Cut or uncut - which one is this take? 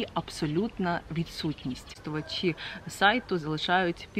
cut